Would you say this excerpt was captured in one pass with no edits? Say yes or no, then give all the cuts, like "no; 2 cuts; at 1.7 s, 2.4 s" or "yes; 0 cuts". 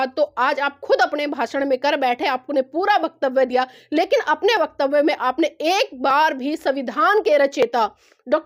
yes; 0 cuts